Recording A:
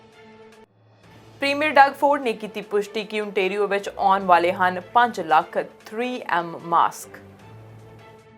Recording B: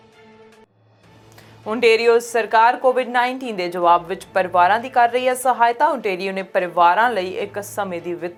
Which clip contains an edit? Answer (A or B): A